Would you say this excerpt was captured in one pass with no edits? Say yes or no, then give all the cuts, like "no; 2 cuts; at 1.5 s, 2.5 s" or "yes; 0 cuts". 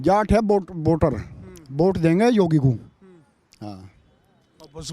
yes; 0 cuts